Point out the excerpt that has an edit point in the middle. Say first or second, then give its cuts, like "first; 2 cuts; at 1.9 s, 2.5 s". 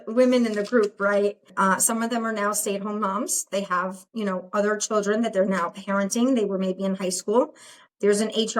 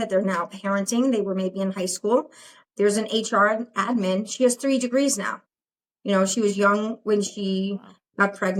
first; 1 cut; at 1.5 s